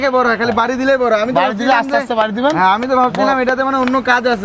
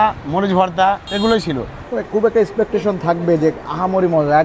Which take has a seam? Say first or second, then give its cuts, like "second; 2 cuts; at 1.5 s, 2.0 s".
second; 2 cuts; at 1.1 s, 1.8 s